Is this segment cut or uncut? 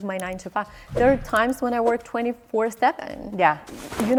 uncut